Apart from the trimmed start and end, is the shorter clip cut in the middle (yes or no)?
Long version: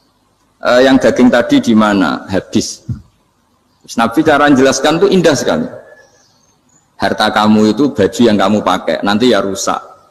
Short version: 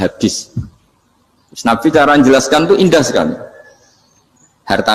no